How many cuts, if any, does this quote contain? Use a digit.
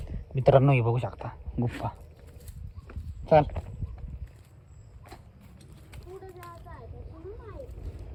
0